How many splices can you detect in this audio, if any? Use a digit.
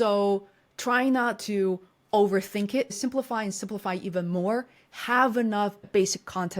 1